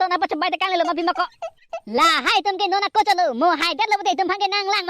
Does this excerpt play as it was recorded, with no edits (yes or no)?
no